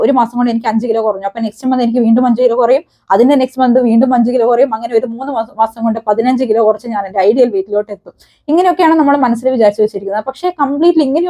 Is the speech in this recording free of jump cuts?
yes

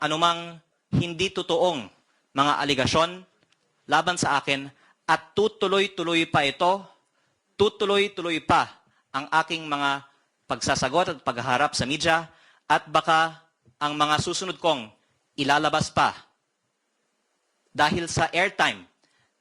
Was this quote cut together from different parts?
no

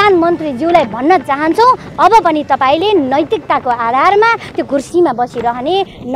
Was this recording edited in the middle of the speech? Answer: no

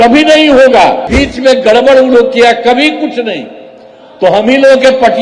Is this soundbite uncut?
no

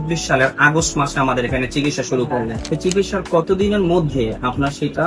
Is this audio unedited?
no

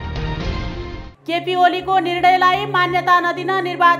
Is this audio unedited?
yes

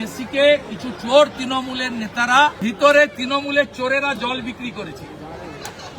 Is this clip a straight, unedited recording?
no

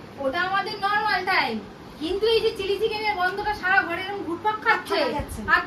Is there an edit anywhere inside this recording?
no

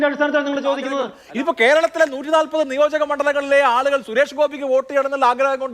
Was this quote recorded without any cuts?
no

